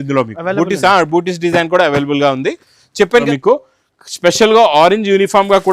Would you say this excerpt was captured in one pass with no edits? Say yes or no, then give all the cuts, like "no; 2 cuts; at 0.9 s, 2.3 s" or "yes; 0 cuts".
no; 1 cut; at 3.2 s